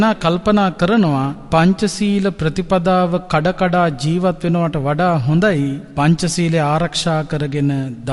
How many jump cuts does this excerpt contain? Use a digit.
2